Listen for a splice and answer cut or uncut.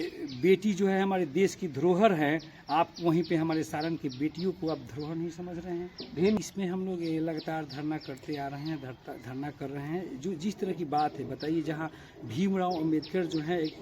cut